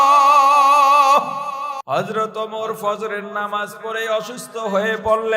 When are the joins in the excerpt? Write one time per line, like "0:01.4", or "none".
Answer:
0:01.8